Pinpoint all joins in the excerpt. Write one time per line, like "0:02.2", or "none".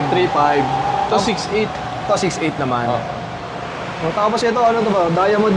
none